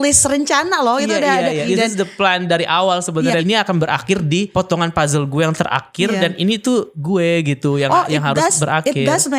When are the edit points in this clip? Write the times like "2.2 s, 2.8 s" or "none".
1.6 s, 3.4 s, 4.5 s, 7.0 s